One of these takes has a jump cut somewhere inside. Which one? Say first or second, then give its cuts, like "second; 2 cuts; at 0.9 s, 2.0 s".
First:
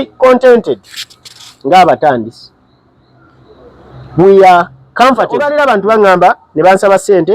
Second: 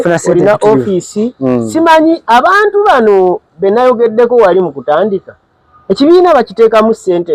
first; 1 cut; at 5.5 s